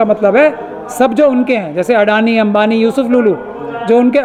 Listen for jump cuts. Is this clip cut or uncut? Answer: uncut